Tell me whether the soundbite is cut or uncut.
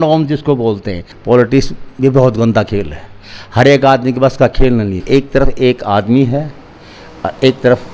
cut